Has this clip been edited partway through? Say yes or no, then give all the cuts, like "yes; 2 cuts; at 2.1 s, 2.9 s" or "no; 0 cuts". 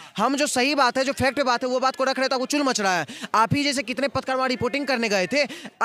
no; 0 cuts